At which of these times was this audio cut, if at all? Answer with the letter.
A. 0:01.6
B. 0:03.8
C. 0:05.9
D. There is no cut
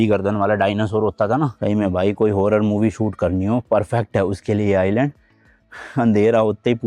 A